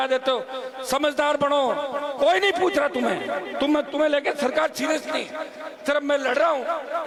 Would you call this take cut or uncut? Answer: uncut